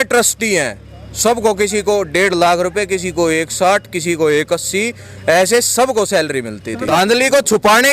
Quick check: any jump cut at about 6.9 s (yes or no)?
yes